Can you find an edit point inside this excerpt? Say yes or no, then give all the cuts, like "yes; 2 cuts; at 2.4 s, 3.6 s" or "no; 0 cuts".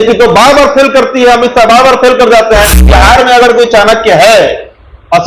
yes; 1 cut; at 2.9 s